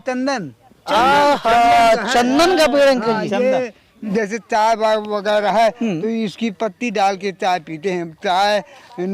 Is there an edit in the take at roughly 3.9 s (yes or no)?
yes